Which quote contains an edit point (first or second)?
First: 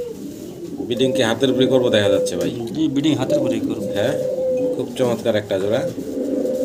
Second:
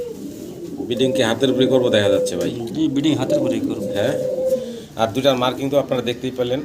second